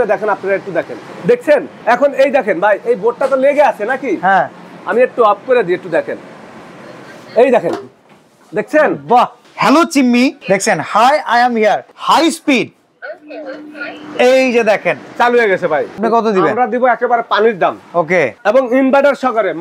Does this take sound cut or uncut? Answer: cut